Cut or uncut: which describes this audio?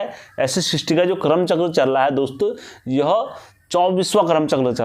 uncut